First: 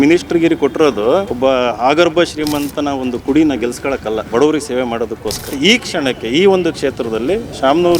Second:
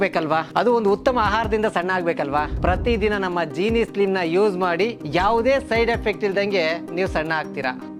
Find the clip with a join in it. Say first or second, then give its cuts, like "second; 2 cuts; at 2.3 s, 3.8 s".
first; 3 cuts; at 1.3 s, 4.2 s, 5.5 s